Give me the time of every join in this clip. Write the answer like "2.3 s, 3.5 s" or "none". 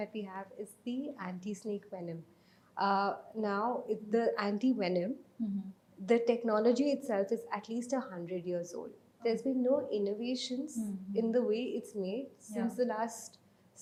none